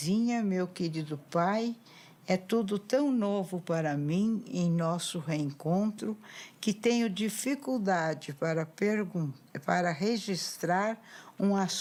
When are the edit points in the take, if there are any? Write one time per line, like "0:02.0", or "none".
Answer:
none